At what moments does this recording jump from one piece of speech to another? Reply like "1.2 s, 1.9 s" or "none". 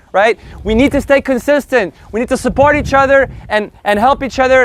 none